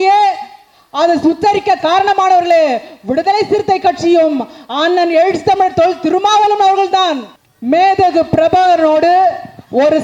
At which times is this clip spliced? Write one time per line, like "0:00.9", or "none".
none